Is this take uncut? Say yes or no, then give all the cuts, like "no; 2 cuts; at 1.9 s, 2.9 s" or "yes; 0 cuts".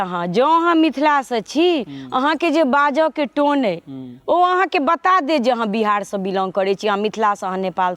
yes; 0 cuts